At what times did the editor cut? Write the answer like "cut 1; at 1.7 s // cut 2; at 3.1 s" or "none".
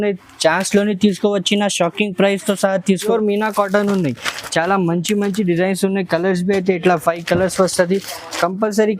cut 1; at 3.1 s